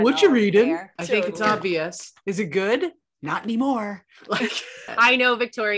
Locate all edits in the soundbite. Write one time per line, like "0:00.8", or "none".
0:00.9
0:04.9